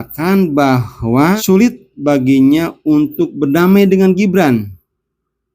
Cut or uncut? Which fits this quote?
cut